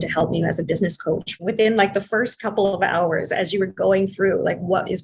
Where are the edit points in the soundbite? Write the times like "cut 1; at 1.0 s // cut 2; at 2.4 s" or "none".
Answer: cut 1; at 1.3 s